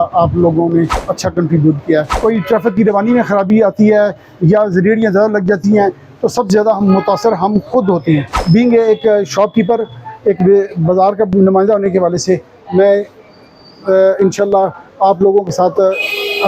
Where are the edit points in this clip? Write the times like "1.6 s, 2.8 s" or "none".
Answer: 1.0 s, 2.1 s, 8.4 s